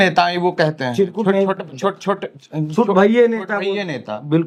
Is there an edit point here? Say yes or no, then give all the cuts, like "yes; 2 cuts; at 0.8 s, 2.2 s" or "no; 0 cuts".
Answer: no; 0 cuts